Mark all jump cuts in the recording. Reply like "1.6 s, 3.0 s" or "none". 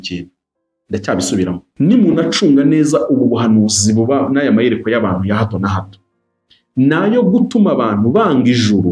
1.7 s